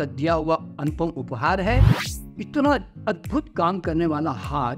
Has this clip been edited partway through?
yes; 1 cut; at 2.0 s

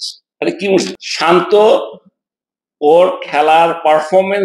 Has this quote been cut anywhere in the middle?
yes; 1 cut; at 1.0 s

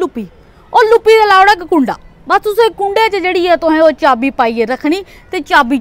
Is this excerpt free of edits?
yes; 0 cuts

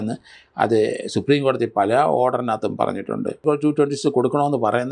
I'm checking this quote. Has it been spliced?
yes; 1 cut; at 3.4 s

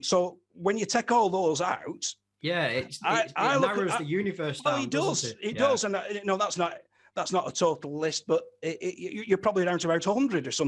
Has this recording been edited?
no; 0 cuts

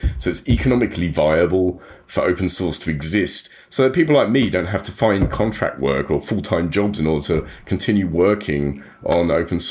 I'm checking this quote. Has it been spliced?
yes; 1 cut; at 6.9 s

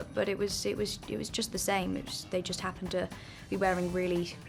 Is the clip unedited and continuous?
yes; 0 cuts

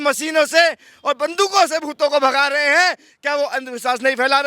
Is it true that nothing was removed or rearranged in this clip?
yes; 0 cuts

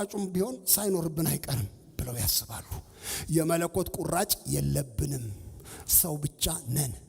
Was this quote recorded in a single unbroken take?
yes; 0 cuts

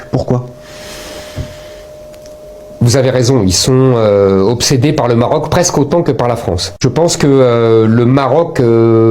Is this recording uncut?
no; 1 cut; at 6.8 s

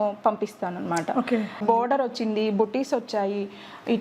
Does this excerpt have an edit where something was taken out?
yes; 1 cut; at 1.6 s

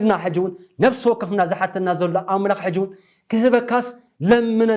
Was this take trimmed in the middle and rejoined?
no; 0 cuts

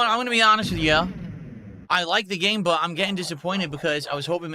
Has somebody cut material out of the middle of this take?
no; 0 cuts

